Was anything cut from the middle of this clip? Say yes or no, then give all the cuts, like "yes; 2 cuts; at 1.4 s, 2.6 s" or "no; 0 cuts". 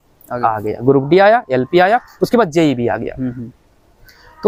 no; 0 cuts